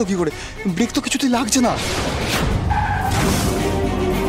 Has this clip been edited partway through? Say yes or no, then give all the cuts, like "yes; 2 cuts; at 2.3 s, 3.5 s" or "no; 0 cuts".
yes; 2 cuts; at 2.3 s, 3.4 s